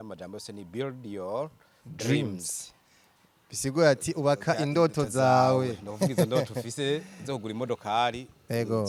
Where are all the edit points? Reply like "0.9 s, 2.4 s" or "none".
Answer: none

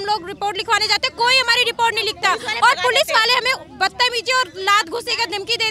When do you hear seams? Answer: none

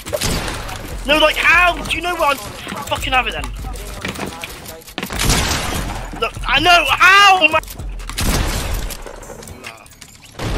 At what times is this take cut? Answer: 4.0 s, 7.6 s

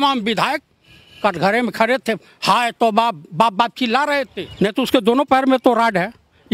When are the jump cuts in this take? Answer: 4.4 s

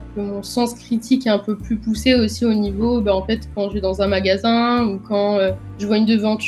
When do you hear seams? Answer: none

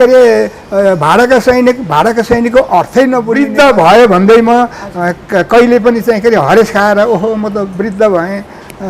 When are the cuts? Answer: 3.3 s

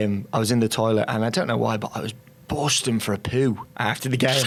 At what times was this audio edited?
none

